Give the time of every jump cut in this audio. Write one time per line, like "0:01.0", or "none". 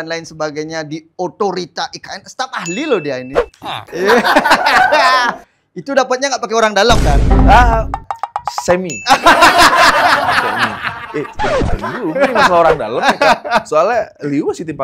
none